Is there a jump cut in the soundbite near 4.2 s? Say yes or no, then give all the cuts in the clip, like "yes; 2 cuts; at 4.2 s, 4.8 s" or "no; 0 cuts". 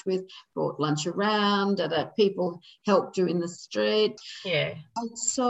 yes; 1 cut; at 4.2 s